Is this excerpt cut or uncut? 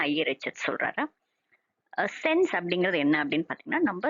cut